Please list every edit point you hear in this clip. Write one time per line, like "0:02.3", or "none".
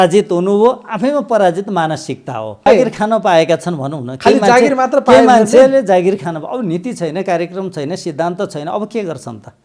0:02.7